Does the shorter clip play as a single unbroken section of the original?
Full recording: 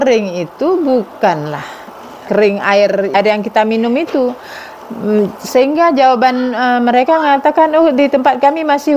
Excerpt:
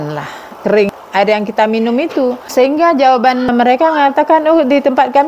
no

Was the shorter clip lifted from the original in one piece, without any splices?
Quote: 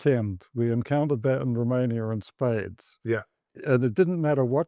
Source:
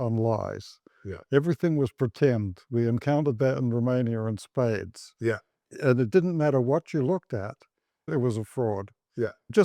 yes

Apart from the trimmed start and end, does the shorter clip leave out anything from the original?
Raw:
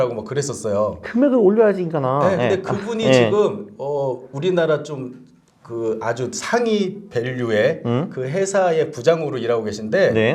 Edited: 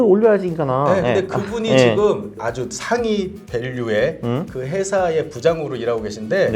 yes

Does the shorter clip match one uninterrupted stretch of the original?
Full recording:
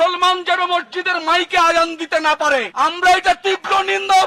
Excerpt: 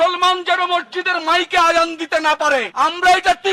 yes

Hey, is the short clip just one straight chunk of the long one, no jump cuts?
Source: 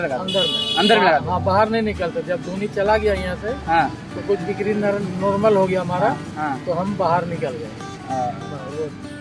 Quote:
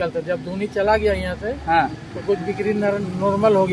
yes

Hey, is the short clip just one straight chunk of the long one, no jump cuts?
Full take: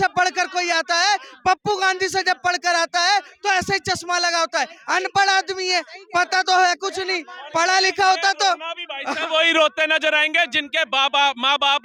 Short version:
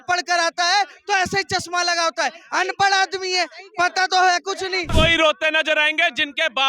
no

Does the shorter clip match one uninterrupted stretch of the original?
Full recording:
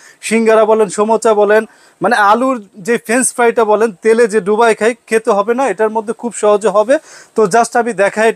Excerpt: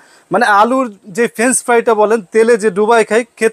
yes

